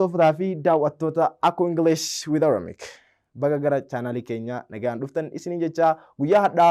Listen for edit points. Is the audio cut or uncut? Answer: uncut